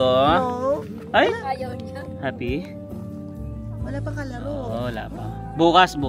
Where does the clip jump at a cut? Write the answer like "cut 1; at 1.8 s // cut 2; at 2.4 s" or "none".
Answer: none